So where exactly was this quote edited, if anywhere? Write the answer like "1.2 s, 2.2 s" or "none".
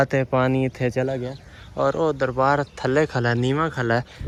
none

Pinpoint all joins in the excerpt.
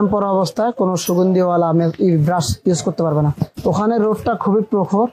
3.4 s

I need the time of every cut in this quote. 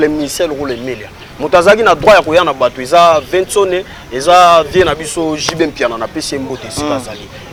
none

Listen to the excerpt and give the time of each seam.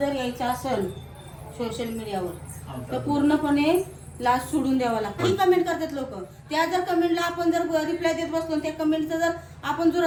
none

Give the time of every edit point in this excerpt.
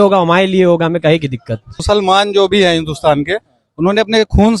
1.8 s

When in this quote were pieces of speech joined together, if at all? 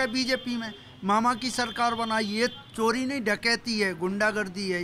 none

